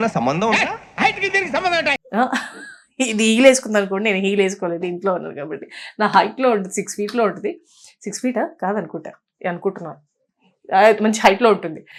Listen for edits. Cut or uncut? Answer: uncut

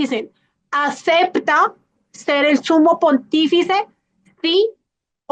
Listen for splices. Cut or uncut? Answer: uncut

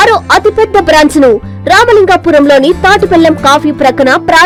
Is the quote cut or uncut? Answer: uncut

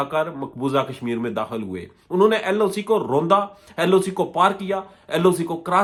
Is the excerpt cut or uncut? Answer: uncut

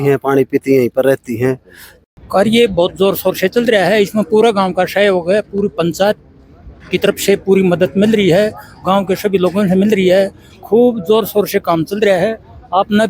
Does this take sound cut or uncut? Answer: cut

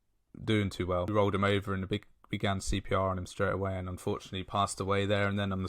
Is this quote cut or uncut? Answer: cut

